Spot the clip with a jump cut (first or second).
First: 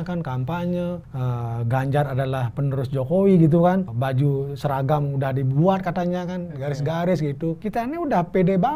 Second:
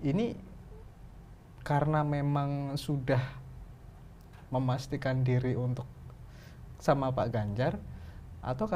first